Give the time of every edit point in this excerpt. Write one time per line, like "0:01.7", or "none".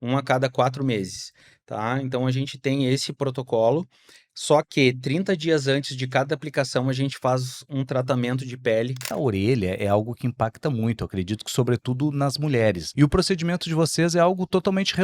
0:09.0
0:12.8